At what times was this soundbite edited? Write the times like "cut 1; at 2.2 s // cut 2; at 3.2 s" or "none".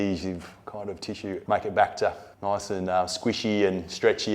cut 1; at 1.4 s // cut 2; at 2.3 s